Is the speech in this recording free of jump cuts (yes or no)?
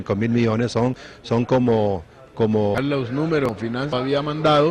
yes